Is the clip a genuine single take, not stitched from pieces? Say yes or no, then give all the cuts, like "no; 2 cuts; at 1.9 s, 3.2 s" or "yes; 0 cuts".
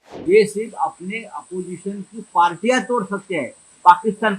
yes; 0 cuts